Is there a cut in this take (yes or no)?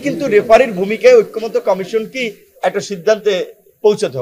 no